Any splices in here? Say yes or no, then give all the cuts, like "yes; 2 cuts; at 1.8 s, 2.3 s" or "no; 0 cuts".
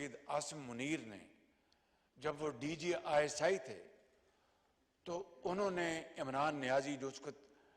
no; 0 cuts